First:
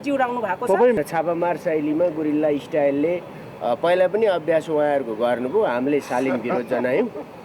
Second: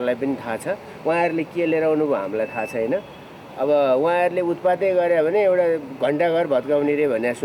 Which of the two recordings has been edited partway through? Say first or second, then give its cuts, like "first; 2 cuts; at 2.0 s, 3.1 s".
first; 1 cut; at 1.0 s